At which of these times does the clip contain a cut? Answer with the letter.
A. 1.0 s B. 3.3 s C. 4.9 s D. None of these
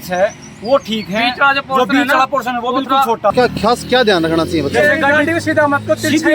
B